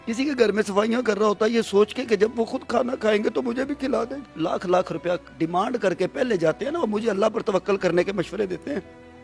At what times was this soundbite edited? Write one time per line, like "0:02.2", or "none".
0:04.3

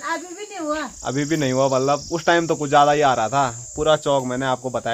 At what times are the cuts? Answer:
none

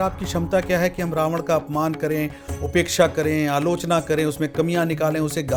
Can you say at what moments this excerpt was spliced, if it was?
none

